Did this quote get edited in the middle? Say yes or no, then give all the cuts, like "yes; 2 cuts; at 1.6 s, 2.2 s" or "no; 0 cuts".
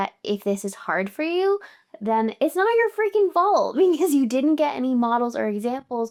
no; 0 cuts